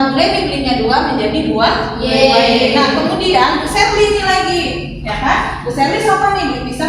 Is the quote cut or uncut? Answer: uncut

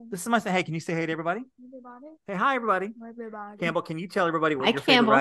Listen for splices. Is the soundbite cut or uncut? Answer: uncut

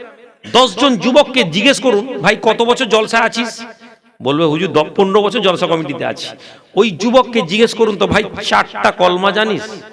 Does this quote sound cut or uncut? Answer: uncut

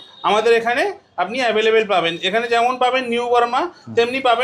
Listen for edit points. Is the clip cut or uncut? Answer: uncut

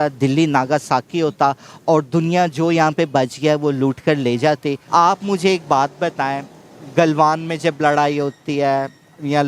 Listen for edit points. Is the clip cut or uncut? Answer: cut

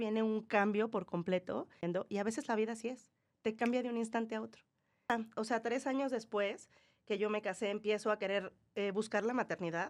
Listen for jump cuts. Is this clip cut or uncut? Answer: cut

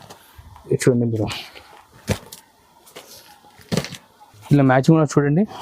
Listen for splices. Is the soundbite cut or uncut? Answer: cut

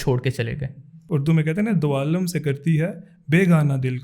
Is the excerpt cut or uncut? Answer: cut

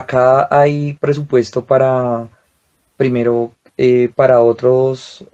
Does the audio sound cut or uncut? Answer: uncut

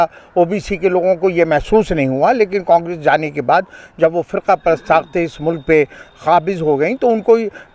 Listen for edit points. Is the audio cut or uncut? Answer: uncut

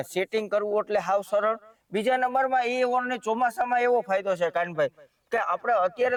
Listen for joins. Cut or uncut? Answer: uncut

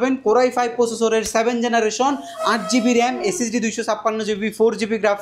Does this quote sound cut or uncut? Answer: uncut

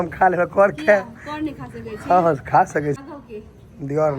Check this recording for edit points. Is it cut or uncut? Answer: cut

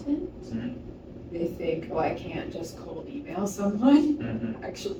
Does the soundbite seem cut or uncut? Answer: uncut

